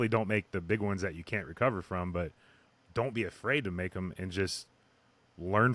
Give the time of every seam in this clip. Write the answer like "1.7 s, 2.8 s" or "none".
none